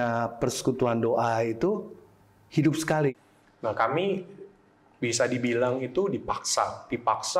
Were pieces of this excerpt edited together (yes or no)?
yes